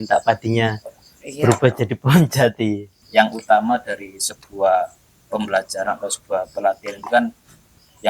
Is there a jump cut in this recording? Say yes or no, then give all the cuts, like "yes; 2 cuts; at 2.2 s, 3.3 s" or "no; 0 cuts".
yes; 1 cut; at 3.0 s